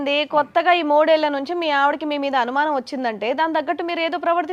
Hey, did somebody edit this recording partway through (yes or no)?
no